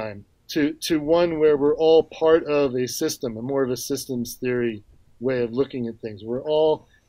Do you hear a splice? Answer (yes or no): no